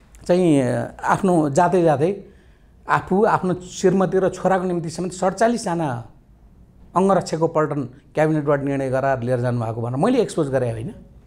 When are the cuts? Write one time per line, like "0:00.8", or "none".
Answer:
none